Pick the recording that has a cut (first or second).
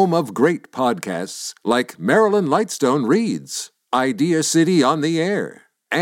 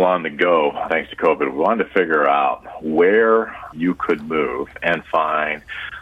second